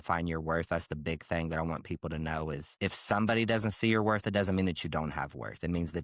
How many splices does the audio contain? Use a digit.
1